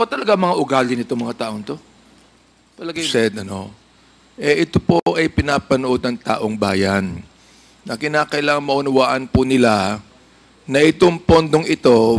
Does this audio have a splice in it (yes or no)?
yes